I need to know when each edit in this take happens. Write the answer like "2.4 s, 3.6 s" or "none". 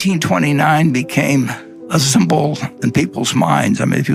none